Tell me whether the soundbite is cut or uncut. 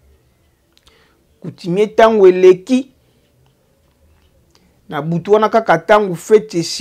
uncut